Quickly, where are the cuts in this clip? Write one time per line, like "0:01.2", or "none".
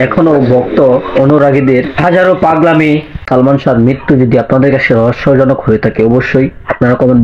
0:03.2